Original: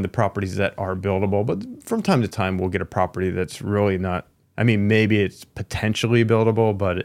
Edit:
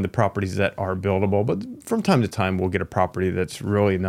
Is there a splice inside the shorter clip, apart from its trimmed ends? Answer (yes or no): no